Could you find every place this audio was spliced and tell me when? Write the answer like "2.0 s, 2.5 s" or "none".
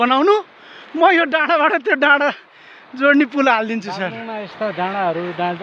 none